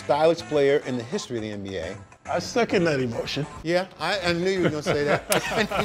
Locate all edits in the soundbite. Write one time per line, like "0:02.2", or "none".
0:02.1